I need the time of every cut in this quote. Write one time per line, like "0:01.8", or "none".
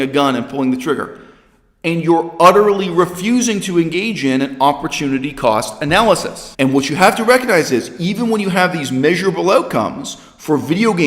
0:06.4